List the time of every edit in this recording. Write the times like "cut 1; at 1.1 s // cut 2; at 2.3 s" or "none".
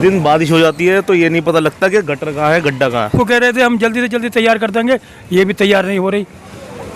cut 1; at 3.1 s